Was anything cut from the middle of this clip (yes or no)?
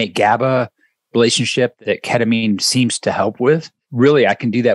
yes